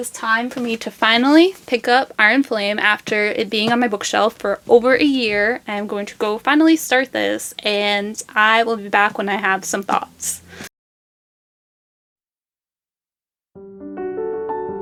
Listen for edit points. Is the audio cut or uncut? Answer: uncut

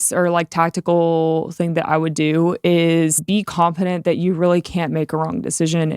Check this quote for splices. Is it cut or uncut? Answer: cut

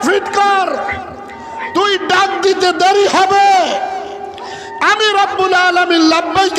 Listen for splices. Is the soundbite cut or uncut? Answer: uncut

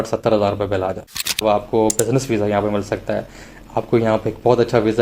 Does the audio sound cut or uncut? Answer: cut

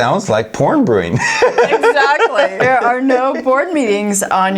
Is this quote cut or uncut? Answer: cut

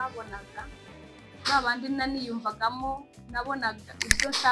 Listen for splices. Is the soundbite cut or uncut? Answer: uncut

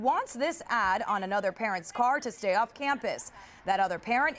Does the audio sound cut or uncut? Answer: uncut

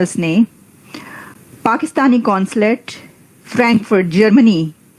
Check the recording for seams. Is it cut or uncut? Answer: uncut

